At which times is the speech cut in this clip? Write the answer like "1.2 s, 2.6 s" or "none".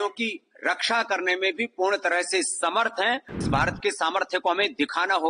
3.4 s